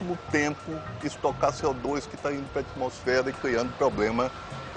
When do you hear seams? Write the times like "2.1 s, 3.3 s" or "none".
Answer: none